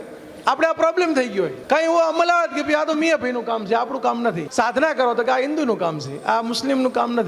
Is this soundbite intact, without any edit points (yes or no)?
no